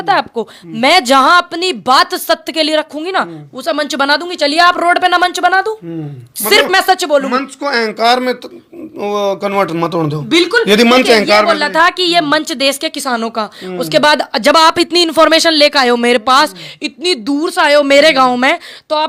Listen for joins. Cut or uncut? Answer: uncut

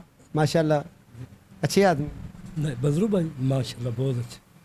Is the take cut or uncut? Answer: uncut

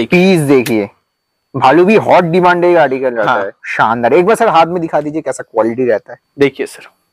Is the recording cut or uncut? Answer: cut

